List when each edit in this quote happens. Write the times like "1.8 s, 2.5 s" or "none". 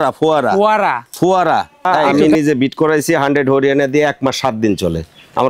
2.0 s